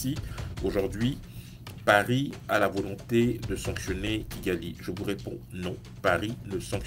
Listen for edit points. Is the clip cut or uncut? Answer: uncut